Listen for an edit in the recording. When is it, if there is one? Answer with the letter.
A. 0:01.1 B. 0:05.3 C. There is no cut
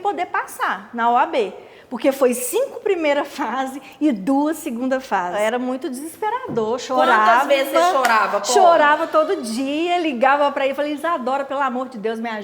B